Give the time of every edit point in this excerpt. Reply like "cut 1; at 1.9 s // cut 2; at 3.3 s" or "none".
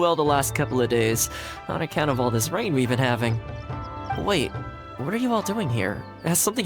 cut 1; at 3.9 s